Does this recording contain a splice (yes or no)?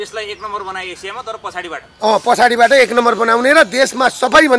no